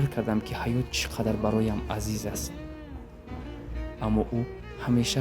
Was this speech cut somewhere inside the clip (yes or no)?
no